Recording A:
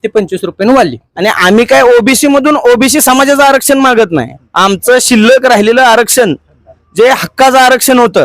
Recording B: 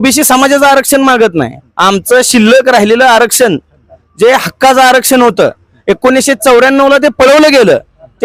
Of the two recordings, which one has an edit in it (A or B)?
A